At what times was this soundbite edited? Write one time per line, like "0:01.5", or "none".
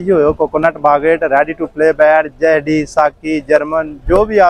none

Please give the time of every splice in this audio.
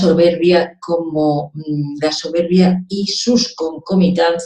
0:02.3

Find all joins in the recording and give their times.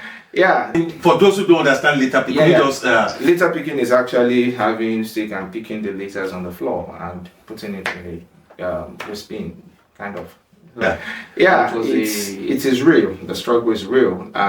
0:00.7
0:10.8

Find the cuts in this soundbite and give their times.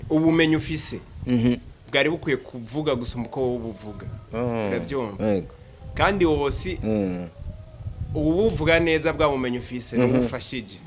0:01.7

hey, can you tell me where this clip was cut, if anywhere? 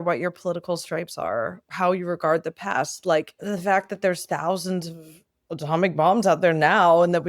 0:01.6
0:03.4

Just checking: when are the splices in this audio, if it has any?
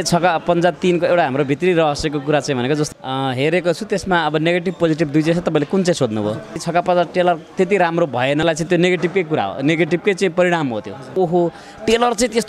0:02.9
0:06.6
0:08.4
0:11.1

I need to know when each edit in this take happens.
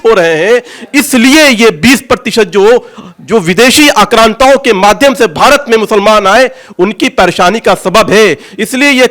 none

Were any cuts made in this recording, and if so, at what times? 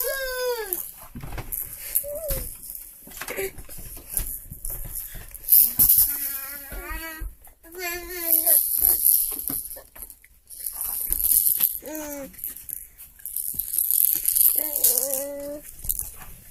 0:06.4

